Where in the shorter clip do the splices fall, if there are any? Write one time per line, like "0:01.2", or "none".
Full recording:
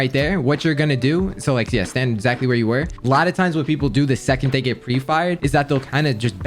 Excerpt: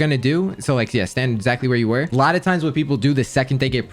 0:02.1